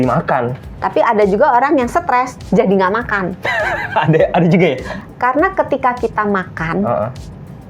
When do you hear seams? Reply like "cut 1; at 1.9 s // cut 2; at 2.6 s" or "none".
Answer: cut 1; at 4.9 s